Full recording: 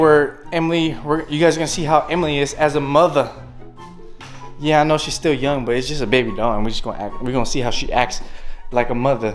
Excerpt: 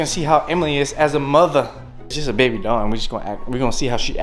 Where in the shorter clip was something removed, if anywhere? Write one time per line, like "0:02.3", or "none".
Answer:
0:02.2